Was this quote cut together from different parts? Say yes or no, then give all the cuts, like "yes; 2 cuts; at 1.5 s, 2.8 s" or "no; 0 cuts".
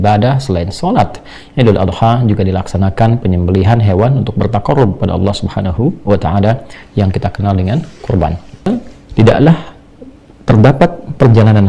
yes; 1 cut; at 8.7 s